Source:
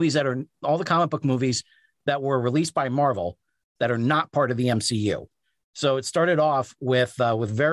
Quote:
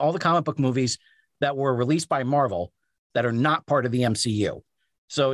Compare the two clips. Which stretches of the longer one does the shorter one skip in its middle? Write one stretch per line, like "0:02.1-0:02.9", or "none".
none

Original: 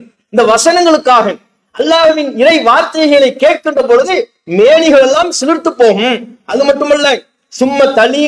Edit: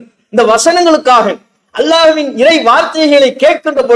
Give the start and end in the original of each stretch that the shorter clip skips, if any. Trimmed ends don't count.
none

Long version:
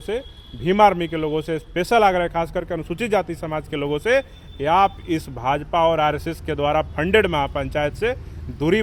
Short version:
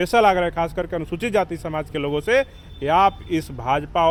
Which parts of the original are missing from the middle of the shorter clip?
none

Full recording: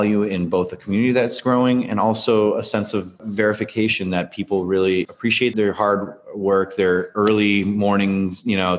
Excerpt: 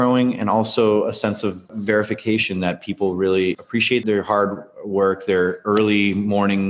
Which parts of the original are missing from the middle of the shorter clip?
none

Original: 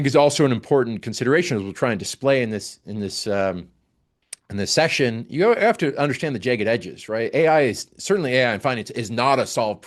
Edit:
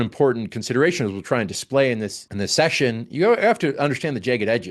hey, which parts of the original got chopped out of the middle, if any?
0:02.7-0:04.4

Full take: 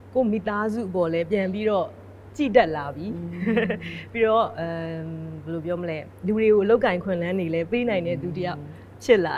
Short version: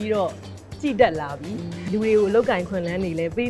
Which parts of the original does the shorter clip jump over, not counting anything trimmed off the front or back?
0:03.3-0:06.1

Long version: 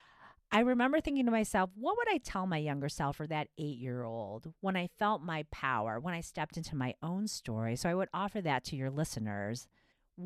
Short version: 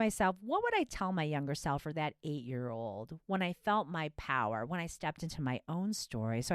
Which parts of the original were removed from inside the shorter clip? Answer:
none

